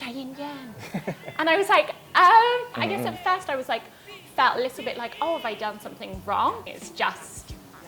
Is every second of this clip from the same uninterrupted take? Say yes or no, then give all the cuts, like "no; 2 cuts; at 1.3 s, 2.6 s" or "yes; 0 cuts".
no; 2 cuts; at 2.8 s, 6.6 s